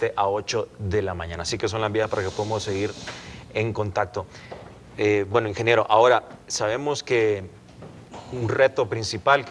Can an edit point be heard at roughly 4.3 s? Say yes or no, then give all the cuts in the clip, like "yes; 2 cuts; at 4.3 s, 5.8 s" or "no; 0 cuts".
yes; 1 cut; at 4.3 s